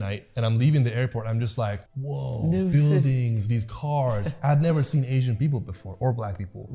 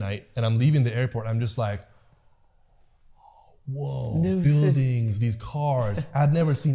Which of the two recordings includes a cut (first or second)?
first